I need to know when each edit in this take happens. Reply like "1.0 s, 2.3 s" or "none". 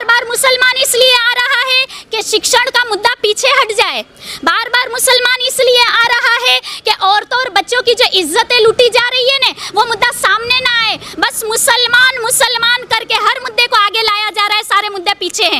none

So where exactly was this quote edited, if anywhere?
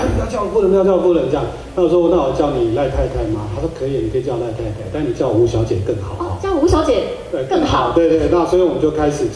none

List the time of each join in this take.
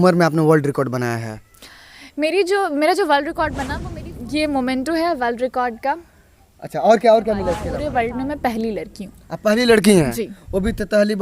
4.3 s, 7.7 s

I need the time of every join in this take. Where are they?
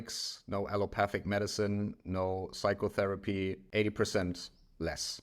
3.6 s

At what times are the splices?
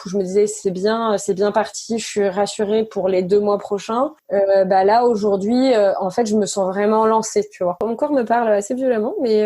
4.2 s, 7.8 s

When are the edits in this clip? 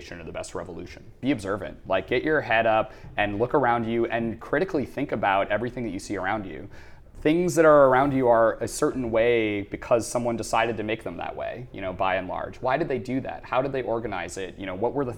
1.1 s

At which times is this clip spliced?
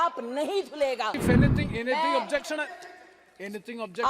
1.2 s

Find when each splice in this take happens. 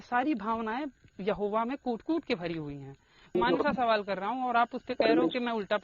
3.4 s

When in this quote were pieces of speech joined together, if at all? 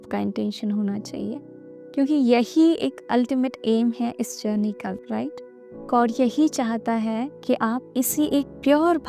none

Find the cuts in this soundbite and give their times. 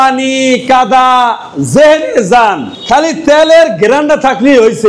2.7 s

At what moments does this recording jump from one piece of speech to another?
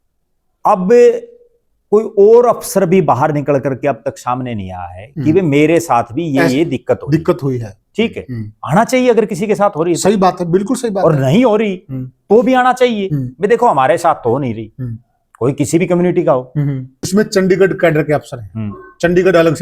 17.1 s

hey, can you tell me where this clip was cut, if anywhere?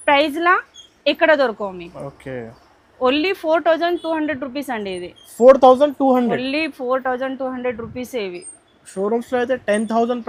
none

